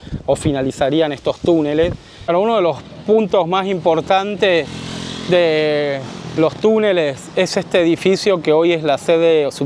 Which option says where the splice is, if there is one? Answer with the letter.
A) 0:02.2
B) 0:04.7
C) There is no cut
A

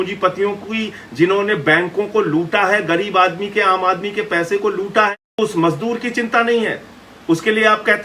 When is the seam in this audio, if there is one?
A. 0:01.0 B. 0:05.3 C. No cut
B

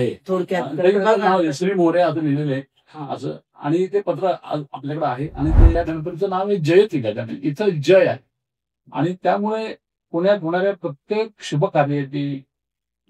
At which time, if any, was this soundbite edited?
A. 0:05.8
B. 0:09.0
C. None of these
A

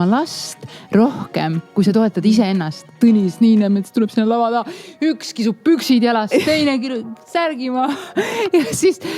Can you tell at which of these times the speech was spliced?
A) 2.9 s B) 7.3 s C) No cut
A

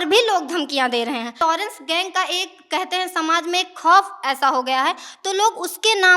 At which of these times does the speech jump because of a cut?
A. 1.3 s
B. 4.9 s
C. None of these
A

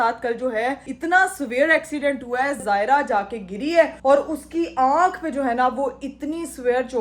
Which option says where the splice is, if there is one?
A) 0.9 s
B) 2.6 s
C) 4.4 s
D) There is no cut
B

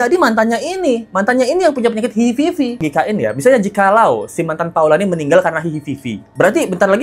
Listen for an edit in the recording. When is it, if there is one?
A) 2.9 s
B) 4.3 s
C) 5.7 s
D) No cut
A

